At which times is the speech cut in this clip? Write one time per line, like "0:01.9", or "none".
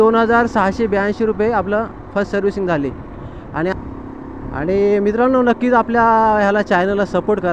0:03.7